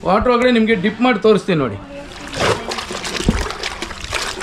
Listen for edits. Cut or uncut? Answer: uncut